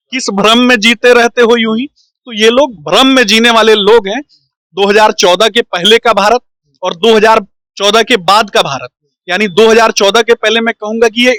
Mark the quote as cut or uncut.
uncut